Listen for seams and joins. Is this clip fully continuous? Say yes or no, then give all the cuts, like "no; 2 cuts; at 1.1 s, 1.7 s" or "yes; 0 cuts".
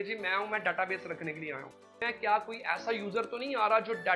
no; 1 cut; at 2.0 s